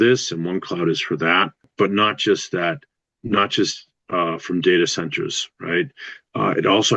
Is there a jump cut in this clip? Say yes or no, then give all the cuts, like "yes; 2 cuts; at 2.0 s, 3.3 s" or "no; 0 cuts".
yes; 1 cut; at 1.7 s